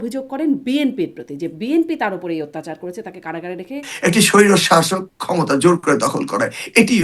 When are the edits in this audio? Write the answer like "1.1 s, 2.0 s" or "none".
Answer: 3.9 s